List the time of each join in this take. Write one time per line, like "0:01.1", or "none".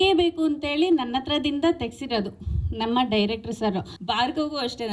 0:03.9